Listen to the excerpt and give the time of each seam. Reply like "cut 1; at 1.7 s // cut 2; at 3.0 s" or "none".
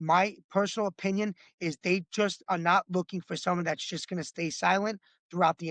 none